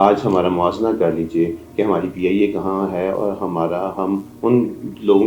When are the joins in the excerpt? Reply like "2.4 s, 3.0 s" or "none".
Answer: none